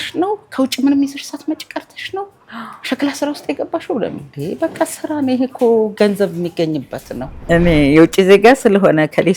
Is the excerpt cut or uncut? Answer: cut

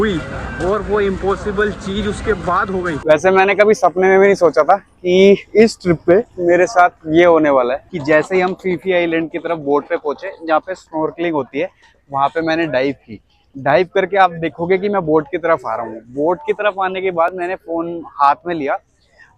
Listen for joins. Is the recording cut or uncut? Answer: cut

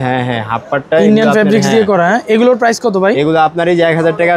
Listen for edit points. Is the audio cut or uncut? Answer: uncut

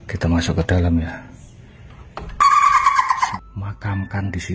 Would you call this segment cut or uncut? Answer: cut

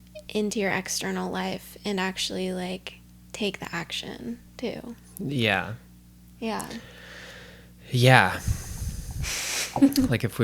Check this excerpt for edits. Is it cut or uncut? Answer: uncut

